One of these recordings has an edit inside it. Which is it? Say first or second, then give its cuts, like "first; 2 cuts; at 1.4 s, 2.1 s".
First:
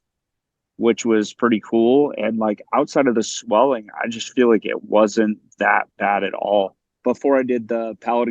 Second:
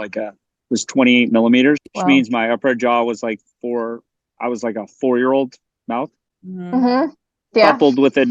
first; 1 cut; at 7.0 s